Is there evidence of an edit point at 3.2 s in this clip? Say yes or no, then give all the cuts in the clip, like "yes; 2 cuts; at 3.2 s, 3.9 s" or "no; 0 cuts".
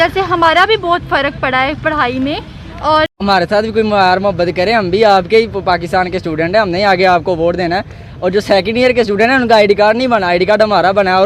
yes; 1 cut; at 3.2 s